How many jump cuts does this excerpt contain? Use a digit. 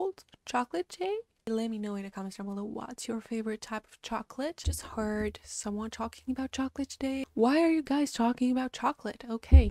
2